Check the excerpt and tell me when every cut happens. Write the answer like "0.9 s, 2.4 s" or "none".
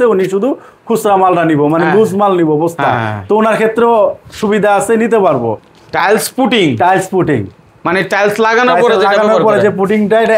5.6 s